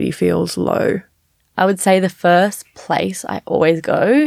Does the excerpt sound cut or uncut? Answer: cut